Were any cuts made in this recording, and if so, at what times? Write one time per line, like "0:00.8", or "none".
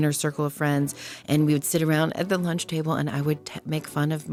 none